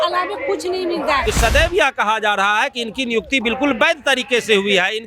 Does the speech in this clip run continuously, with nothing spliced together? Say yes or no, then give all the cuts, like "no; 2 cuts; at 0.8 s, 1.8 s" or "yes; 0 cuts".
no; 1 cut; at 1.2 s